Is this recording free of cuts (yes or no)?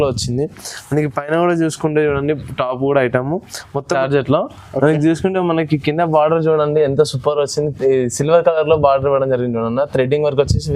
no